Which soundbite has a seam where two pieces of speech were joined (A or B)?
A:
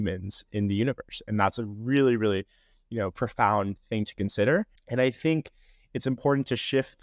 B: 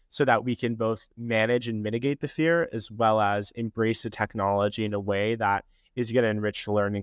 A